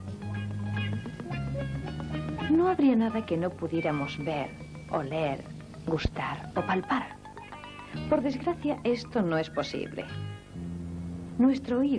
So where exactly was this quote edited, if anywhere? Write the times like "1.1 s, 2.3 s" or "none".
8.3 s